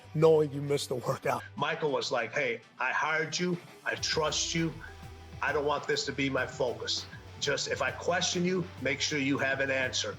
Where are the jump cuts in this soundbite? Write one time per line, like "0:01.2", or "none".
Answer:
0:01.3